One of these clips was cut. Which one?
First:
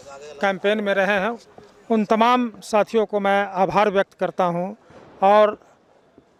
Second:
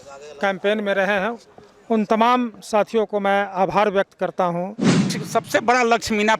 second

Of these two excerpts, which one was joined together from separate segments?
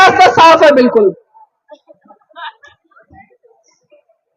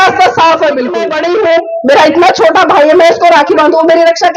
second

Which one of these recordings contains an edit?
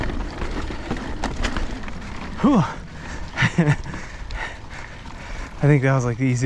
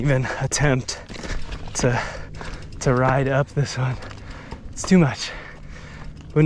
first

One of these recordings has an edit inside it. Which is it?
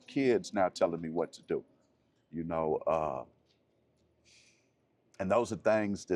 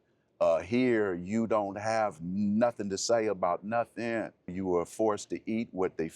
second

